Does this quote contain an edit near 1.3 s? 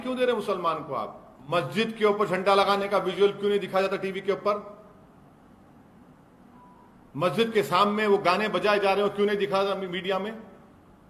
yes; 1 cut; at 1.3 s

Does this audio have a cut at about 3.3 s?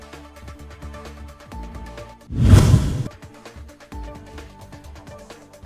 no; 1 cut; at 1.6 s

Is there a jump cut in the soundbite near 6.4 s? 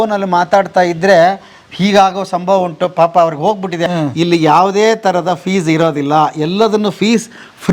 no; 1 cut; at 3.8 s

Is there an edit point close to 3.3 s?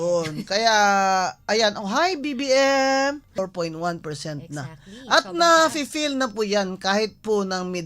yes; 1 cut; at 3.3 s

